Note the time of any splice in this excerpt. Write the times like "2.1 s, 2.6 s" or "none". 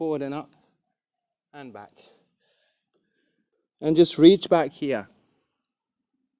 3.4 s